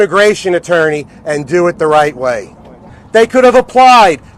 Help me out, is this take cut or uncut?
cut